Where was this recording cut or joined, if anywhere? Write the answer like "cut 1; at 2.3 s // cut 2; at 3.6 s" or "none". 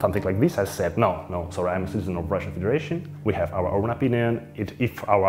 cut 1; at 3.1 s